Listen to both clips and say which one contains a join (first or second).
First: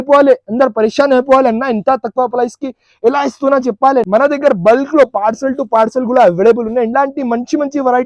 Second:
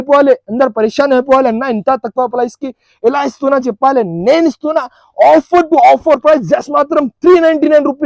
first